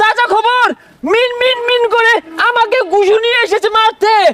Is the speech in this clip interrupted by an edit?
no; 0 cuts

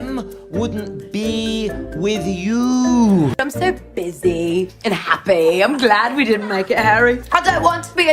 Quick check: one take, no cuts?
no; 1 cut; at 3.4 s

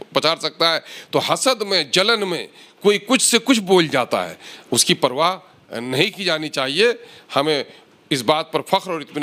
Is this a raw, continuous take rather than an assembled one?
yes; 0 cuts

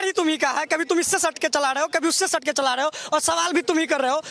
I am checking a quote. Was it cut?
no; 0 cuts

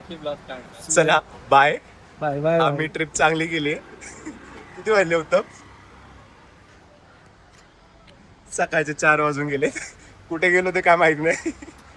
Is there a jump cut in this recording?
no; 0 cuts

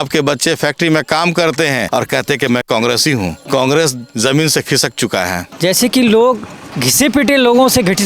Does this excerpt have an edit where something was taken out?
yes; 4 cuts; at 1.9 s, 3.4 s, 5.4 s, 6.8 s

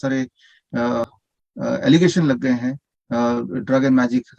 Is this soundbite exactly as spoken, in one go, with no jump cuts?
no; 1 cut; at 1.0 s

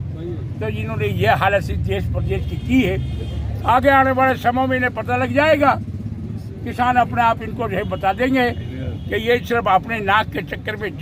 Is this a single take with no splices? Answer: yes; 0 cuts

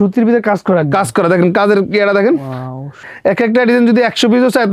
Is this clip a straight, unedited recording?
no; 1 cut; at 3.0 s

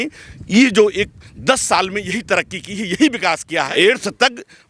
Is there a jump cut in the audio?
yes; 1 cut; at 3.7 s

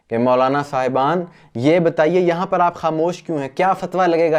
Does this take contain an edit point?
no; 0 cuts

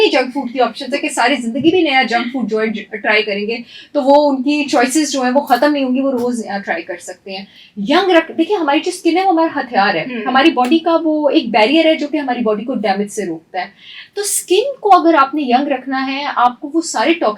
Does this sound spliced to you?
no; 0 cuts

